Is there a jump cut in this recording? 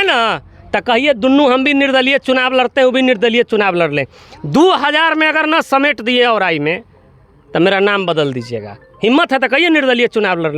no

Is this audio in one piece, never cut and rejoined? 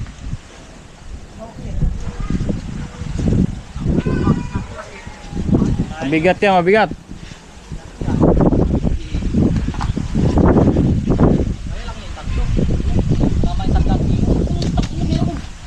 yes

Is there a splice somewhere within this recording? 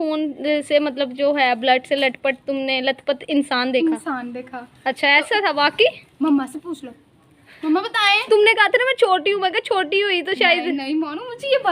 no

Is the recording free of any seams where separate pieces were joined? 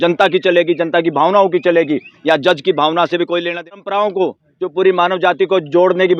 no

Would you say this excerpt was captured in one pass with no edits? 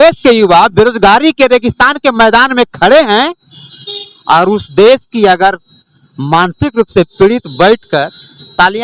yes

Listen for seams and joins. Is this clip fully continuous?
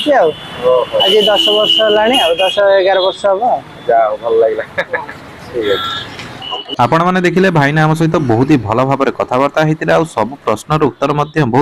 yes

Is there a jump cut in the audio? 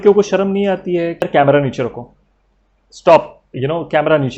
yes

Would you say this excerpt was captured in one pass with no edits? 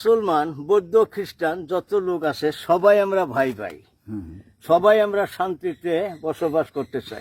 yes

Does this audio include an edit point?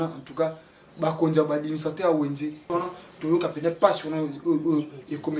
yes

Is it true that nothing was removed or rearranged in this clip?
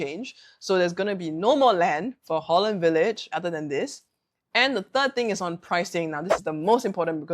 no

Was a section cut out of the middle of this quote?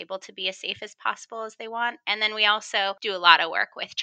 yes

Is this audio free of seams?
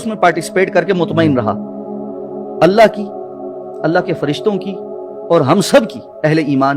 yes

